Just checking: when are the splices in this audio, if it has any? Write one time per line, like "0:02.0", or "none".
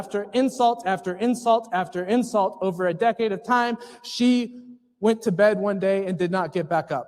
none